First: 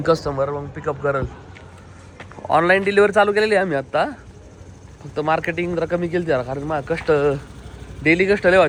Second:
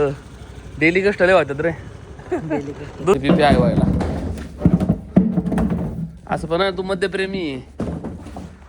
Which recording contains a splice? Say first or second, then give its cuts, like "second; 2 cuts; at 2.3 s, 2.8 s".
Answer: second; 1 cut; at 3.1 s